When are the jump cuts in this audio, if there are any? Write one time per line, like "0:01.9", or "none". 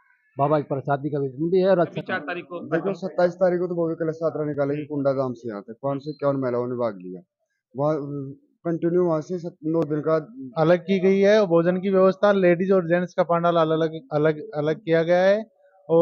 0:02.0
0:10.4